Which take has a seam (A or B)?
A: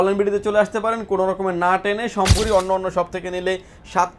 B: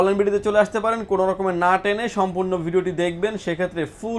A